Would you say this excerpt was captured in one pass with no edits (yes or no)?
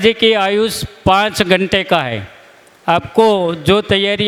yes